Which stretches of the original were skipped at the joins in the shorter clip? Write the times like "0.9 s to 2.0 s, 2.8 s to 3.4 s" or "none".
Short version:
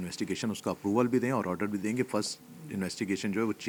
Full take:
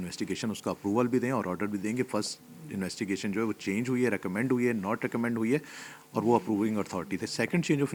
none